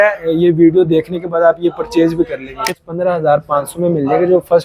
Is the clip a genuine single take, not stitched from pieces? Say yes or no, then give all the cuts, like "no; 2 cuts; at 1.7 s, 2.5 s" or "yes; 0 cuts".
no; 1 cut; at 2.6 s